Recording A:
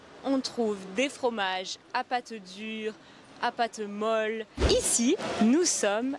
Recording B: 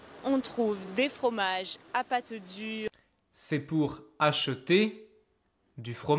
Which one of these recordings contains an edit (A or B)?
A